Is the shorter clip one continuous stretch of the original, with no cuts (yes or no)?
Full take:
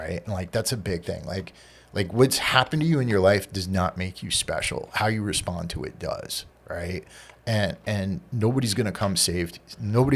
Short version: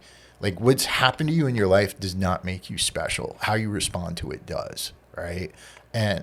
yes